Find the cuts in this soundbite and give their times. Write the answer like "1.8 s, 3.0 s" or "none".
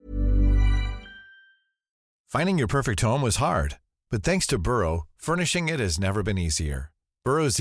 2.1 s